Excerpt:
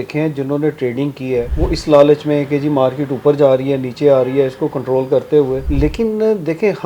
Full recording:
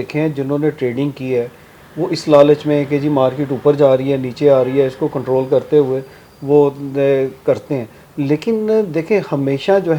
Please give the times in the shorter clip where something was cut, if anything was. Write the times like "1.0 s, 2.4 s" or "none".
1.5 s, 5.7 s

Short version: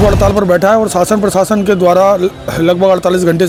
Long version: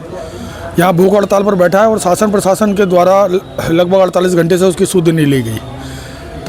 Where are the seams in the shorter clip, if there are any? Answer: none

